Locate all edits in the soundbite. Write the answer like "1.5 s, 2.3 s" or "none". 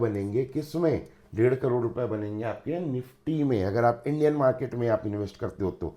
none